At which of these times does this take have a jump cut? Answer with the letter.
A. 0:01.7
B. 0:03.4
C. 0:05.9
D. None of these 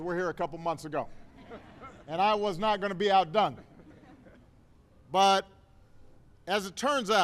D